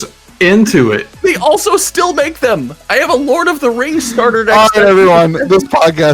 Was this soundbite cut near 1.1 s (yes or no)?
no